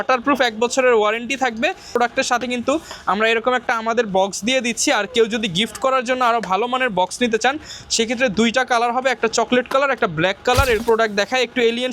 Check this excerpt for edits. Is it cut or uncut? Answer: cut